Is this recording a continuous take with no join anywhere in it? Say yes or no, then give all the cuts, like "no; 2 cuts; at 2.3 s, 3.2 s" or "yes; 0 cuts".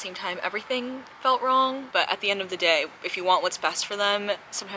no; 1 cut; at 1.8 s